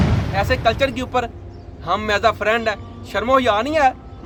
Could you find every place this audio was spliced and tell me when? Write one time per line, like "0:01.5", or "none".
none

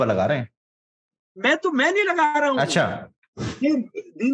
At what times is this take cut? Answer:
none

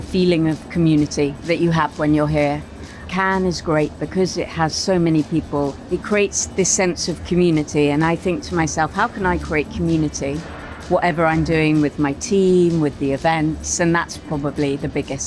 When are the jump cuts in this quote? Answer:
0:02.9
0:05.8

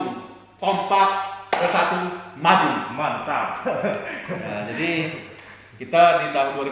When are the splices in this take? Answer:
none

